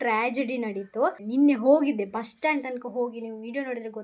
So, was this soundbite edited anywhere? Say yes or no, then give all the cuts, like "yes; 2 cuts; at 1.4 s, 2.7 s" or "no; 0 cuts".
yes; 1 cut; at 1.2 s